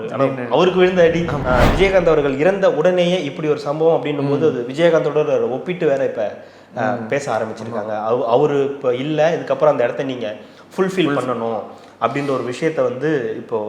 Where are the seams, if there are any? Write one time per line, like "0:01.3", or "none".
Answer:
0:01.3